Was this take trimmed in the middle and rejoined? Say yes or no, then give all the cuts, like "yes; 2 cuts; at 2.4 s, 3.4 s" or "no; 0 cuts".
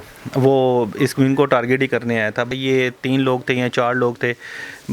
yes; 1 cut; at 2.5 s